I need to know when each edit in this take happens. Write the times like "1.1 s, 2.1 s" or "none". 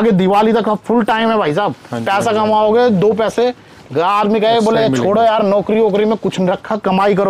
none